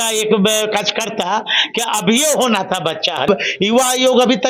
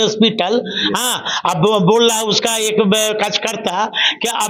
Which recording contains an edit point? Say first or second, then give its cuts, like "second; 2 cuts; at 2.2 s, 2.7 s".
first; 1 cut; at 3.3 s